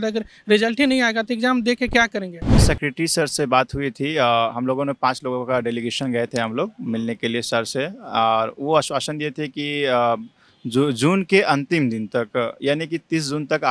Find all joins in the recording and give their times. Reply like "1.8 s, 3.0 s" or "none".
2.6 s